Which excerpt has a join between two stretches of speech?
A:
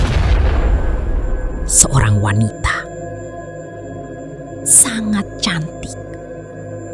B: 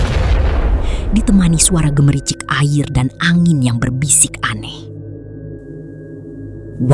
B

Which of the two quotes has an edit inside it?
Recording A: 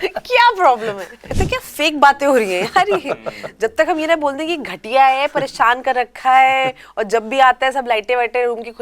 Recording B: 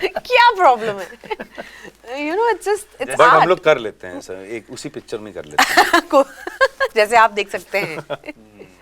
A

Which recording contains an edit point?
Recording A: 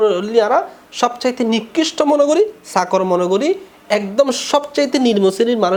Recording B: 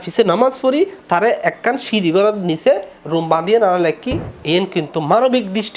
B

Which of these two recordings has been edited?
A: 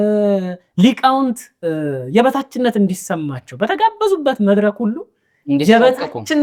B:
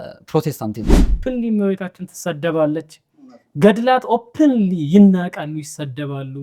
B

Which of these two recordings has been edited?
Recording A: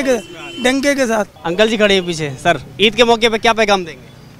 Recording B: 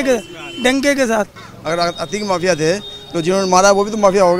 B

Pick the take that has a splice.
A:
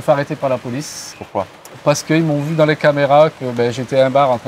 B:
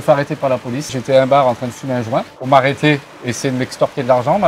B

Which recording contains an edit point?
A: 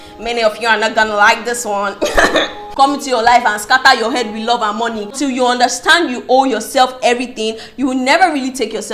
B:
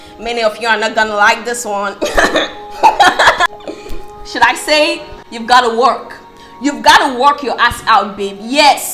A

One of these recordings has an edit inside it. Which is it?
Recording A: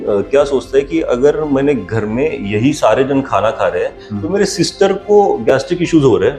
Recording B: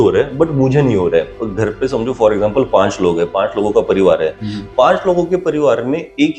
B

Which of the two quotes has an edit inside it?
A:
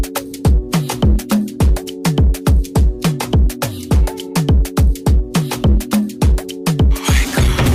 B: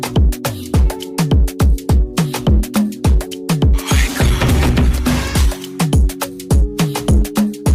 B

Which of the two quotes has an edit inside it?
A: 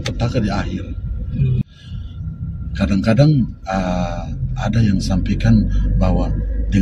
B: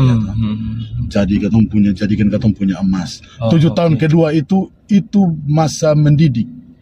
A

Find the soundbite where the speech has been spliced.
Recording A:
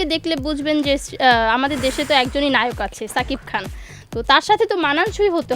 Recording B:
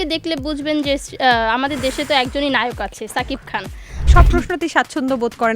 B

